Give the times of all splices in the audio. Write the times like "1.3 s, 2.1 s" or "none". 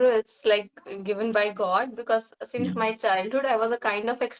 none